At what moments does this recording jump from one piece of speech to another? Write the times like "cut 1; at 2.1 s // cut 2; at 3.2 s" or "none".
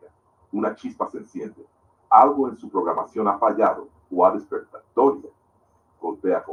none